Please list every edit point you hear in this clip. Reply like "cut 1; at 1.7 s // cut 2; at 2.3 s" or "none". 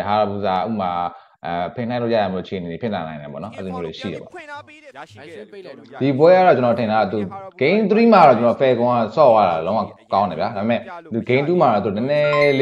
cut 1; at 4.7 s

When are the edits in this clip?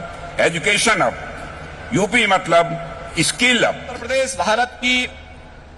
cut 1; at 4.0 s

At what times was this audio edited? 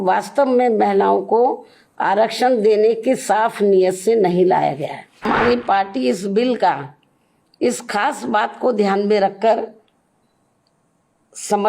cut 1; at 5.2 s

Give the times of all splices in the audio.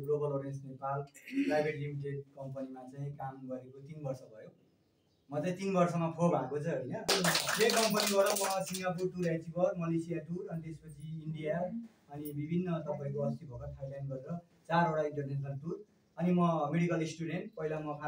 cut 1; at 7.1 s

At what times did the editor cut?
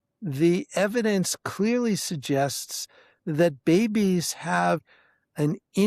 cut 1; at 4.9 s

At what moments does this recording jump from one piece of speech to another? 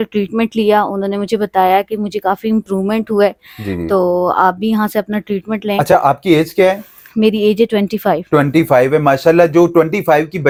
none

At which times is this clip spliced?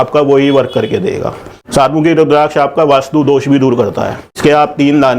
cut 1; at 1.5 s // cut 2; at 4.2 s

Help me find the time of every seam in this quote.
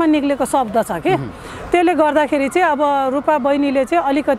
none

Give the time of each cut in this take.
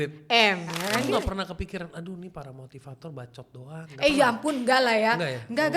cut 1; at 1.0 s

